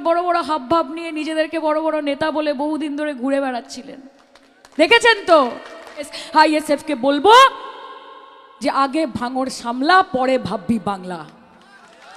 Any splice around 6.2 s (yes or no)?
yes